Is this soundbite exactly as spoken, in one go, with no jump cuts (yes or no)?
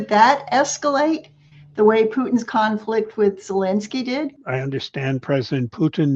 no